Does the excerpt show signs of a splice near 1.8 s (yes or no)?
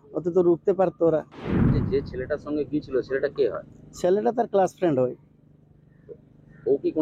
yes